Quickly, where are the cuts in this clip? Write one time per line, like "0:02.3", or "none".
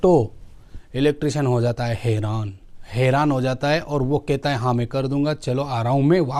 none